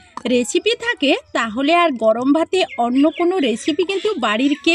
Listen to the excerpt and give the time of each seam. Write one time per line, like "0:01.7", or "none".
none